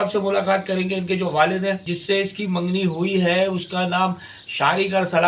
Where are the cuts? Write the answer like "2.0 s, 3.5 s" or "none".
1.8 s